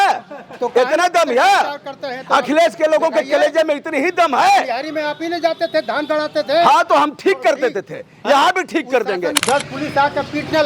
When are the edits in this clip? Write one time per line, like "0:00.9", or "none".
0:09.4